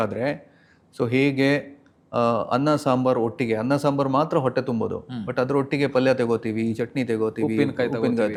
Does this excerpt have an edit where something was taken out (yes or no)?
no